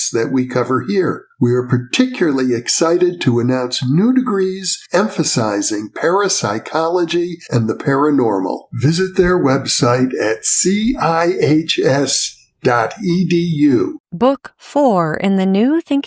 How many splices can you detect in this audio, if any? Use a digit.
1